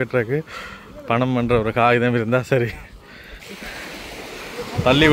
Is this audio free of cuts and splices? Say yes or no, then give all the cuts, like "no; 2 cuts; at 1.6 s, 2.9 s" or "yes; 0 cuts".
yes; 0 cuts